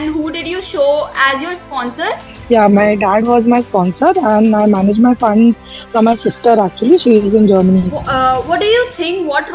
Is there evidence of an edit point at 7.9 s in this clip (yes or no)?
yes